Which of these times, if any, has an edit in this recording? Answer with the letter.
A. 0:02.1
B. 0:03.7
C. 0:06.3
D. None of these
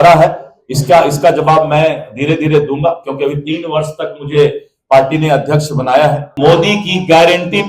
C